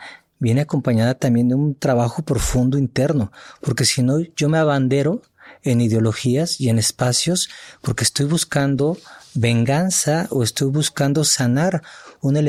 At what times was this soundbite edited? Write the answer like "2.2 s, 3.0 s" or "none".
none